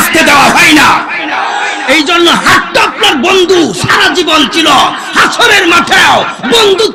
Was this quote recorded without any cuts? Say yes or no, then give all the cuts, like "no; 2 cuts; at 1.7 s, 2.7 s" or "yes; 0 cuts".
yes; 0 cuts